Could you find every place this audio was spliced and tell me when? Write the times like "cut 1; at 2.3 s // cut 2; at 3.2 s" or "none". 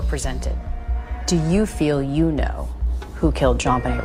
none